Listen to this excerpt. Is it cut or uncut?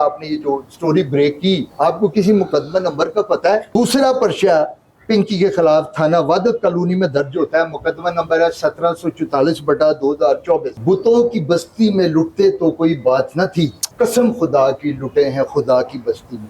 cut